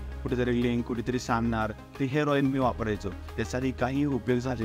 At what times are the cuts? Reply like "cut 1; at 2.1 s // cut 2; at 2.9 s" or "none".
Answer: cut 1; at 3.3 s